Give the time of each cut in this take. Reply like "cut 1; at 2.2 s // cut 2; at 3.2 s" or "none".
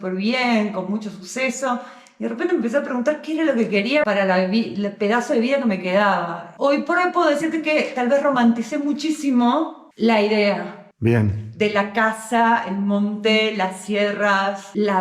cut 1; at 6.4 s